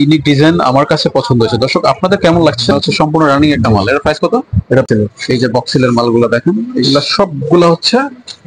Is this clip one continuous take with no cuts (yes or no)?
no